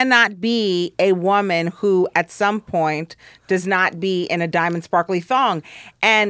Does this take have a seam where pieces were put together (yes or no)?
no